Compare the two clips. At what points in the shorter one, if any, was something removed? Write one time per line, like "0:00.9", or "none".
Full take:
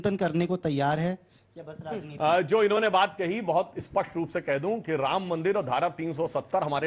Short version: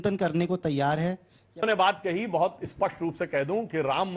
0:01.6